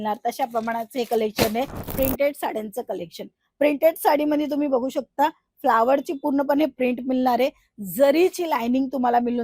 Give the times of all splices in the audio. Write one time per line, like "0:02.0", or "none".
0:01.8